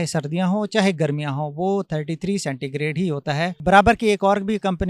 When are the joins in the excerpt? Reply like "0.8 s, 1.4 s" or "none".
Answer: 3.6 s